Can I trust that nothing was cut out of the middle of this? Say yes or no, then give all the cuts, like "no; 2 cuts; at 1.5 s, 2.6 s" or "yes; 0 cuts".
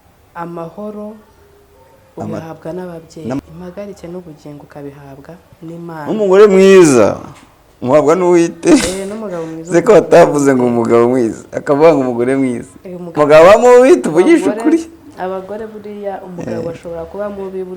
no; 2 cuts; at 3.4 s, 13.1 s